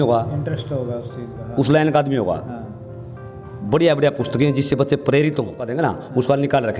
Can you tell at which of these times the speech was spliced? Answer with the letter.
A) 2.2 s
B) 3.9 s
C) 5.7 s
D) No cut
C